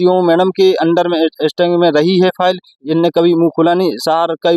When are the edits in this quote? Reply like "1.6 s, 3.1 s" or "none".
none